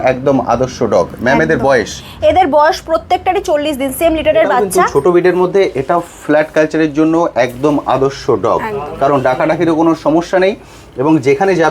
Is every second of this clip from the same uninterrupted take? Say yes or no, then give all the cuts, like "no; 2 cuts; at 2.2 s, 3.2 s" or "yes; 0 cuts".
no; 1 cut; at 4.8 s